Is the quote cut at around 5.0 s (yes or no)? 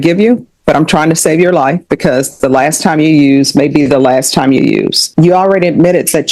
yes